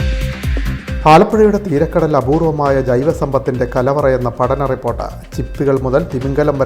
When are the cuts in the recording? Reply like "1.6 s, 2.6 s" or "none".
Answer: 1.0 s